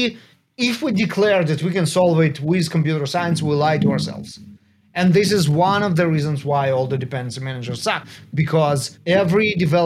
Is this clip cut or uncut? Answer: uncut